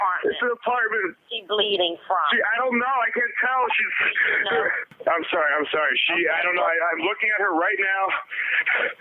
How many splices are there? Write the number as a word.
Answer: two